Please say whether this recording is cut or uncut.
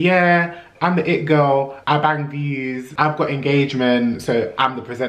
cut